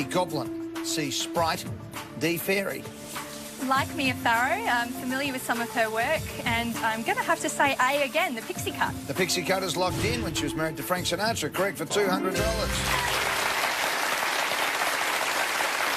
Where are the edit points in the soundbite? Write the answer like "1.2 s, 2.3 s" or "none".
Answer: 7.0 s